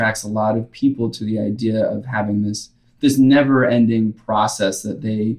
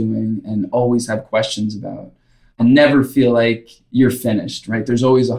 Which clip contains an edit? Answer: second; 2 cuts; at 2.6 s, 3.7 s

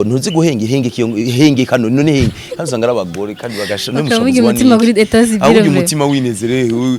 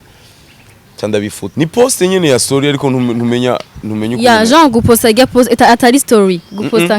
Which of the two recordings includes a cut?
second; 1 cut; at 1.4 s

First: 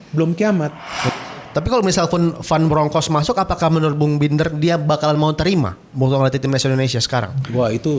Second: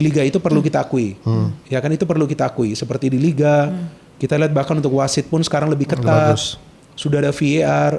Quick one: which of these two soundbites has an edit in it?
first; 1 cut; at 1.1 s

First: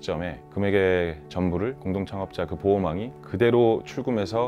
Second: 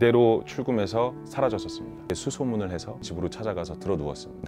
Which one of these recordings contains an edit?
second; 1 cut; at 2.1 s

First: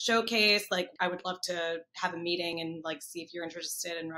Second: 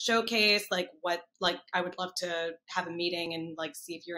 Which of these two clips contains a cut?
first; 1 cut; at 0.9 s

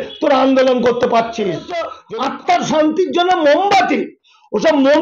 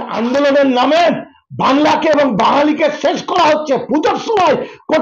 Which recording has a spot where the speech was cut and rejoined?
first; 1 cut; at 2.0 s

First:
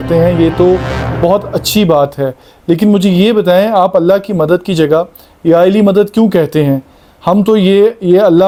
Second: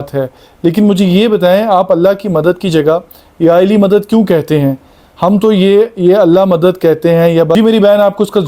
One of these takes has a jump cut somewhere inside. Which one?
second; 1 cut; at 7.5 s

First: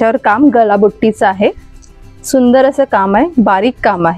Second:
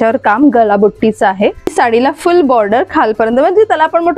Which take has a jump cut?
second; 1 cut; at 1.7 s

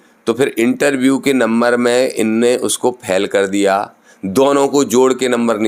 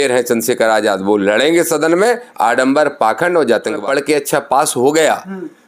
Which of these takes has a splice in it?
second; 1 cut; at 3.8 s

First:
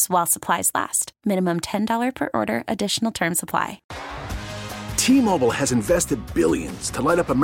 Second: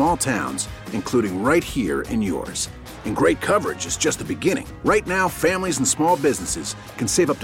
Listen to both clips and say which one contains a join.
first; 1 cut; at 3.9 s

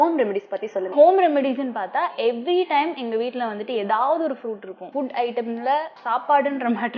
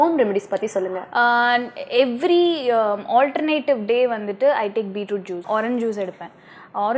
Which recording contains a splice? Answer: first; 3 cuts; at 0.8 s, 4.8 s, 6.0 s

